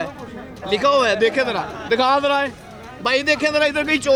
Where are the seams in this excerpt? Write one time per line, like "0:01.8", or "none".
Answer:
none